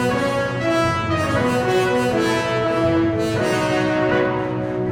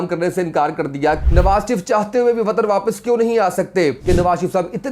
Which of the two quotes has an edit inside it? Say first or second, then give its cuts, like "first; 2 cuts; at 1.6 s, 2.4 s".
second; 2 cuts; at 1.2 s, 4.0 s